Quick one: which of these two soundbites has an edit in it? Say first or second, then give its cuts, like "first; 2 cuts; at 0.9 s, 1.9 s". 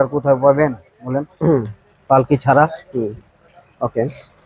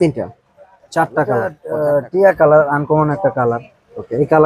second; 1 cut; at 1.6 s